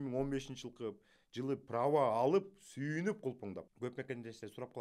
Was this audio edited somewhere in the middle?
yes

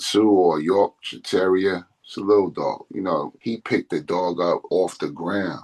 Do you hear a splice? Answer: yes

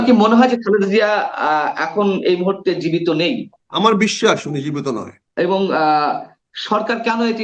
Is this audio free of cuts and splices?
no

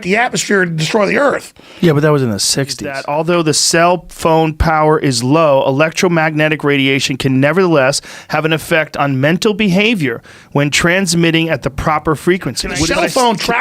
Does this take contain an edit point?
yes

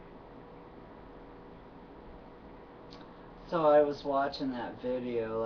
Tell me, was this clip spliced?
yes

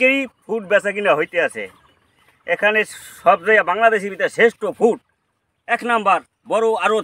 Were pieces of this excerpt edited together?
no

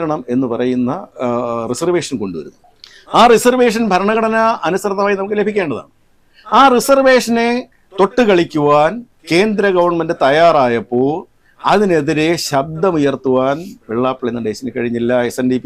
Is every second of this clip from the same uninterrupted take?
yes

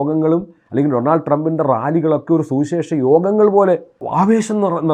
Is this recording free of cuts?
no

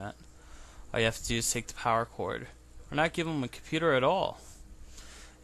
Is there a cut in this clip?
no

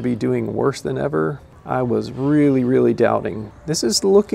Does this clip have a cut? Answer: yes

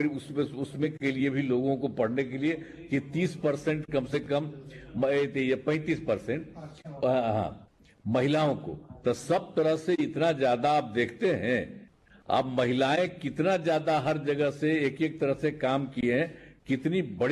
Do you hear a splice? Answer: no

